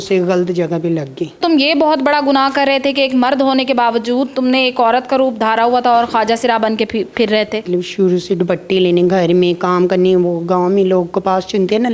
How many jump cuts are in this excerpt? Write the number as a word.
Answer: two